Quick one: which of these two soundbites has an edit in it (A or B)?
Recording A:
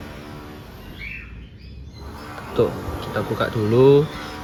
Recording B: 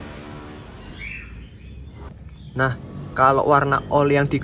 B